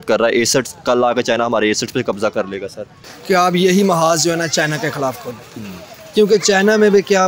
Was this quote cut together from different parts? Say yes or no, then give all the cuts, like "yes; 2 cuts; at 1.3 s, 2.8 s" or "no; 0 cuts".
yes; 1 cut; at 3.1 s